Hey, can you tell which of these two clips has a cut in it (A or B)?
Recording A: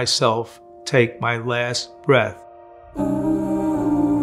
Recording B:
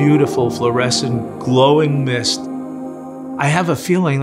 B